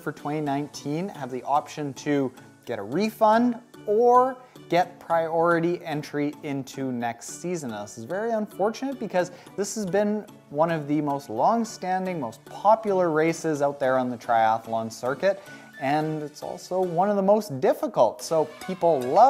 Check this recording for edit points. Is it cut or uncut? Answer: uncut